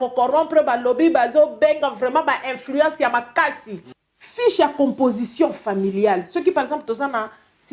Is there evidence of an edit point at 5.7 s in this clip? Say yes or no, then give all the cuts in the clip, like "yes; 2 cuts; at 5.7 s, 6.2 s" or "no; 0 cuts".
no; 1 cut; at 3.9 s